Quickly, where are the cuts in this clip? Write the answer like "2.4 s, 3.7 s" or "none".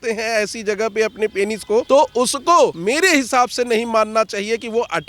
1.9 s, 2.8 s